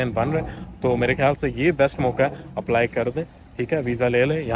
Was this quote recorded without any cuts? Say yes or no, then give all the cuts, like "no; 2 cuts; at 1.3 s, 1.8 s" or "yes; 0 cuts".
yes; 0 cuts